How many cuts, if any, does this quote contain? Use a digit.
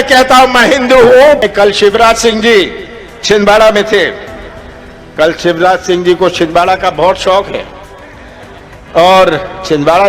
1